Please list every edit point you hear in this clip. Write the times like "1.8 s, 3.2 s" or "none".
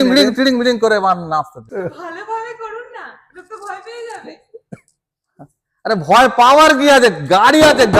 1.6 s